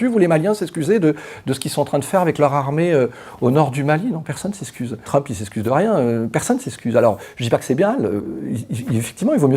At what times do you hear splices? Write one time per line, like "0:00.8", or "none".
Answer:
none